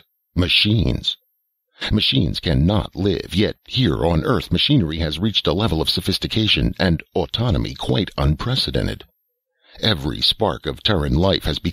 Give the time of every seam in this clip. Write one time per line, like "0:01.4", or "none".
0:01.1